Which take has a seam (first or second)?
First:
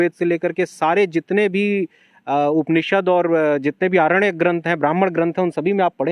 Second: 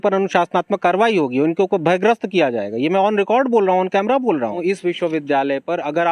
second